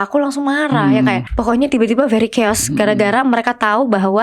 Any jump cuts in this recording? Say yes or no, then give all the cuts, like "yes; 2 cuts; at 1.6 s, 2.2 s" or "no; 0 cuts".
yes; 1 cut; at 1.3 s